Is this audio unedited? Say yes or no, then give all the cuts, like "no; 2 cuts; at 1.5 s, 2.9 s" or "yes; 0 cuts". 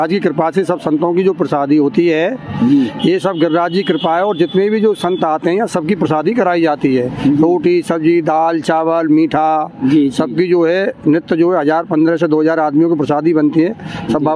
yes; 0 cuts